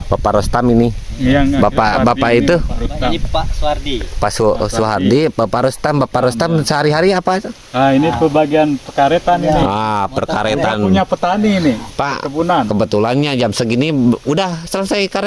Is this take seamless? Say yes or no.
yes